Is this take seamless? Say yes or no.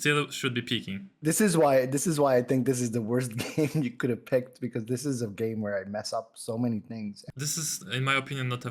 no